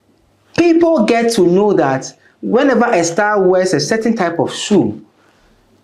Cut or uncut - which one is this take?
uncut